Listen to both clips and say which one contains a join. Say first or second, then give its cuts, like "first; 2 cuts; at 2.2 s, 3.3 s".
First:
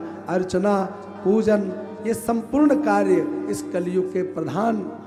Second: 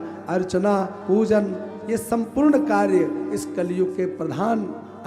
second; 1 cut; at 1.0 s